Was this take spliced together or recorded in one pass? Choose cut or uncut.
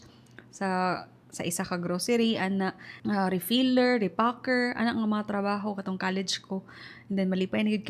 cut